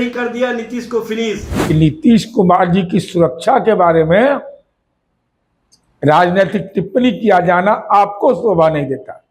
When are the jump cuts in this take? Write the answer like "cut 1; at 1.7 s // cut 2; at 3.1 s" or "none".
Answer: cut 1; at 1.5 s